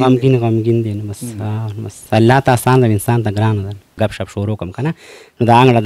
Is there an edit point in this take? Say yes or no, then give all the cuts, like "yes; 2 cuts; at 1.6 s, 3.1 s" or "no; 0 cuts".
yes; 1 cut; at 4.0 s